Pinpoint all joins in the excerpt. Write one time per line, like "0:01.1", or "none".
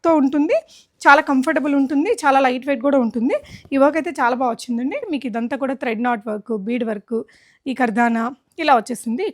0:05.0